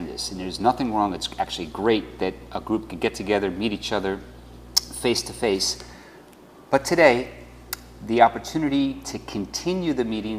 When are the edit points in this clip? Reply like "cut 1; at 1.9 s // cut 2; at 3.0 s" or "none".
cut 1; at 5.7 s

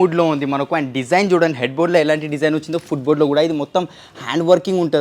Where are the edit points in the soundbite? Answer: none

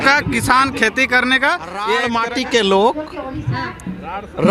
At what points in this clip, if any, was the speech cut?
cut 1; at 2.0 s

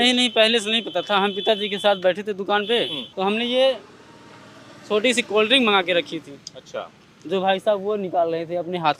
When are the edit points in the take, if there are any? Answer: cut 1; at 3.0 s

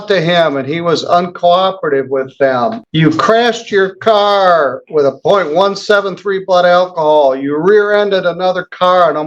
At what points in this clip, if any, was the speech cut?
cut 1; at 2.8 s

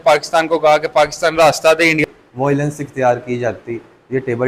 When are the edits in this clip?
cut 1; at 2.0 s

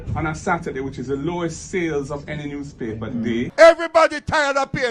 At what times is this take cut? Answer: none

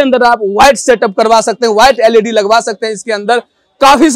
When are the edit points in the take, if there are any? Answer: none

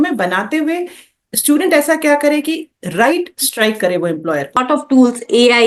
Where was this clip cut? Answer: cut 1; at 4.6 s

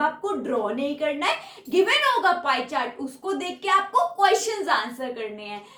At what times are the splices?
none

